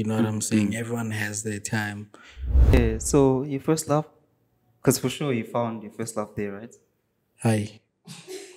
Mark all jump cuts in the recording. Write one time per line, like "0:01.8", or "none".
0:02.7